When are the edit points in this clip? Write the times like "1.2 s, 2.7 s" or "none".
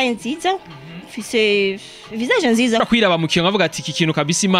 2.8 s